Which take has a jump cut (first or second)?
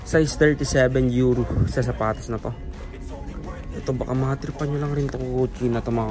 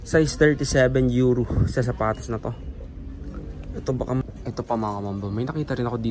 second